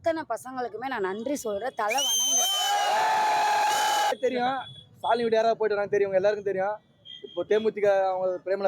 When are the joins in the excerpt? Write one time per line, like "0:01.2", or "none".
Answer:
0:04.1